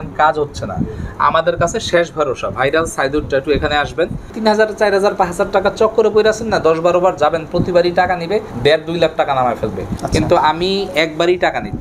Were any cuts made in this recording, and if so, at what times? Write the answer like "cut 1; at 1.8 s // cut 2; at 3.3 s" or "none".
cut 1; at 4.3 s // cut 2; at 8.5 s